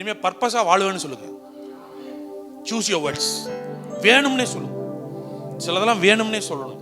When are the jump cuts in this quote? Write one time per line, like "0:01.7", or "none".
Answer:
none